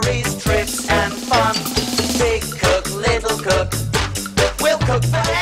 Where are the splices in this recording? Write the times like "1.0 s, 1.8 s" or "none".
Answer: 3.6 s